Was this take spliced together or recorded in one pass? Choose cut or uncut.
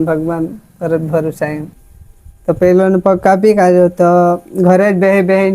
cut